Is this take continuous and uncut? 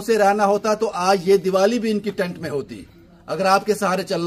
yes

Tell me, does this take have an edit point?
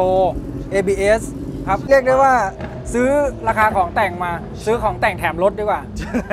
yes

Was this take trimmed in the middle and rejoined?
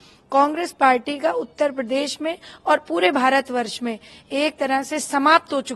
no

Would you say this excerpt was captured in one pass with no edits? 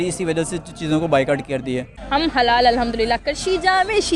no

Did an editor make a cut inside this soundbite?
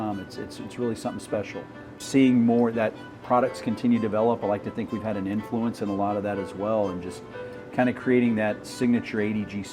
yes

